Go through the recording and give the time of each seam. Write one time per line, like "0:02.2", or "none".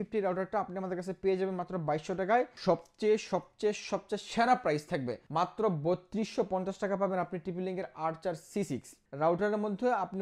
0:02.6
0:05.2
0:09.0